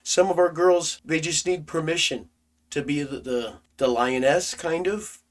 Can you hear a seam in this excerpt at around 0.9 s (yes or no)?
yes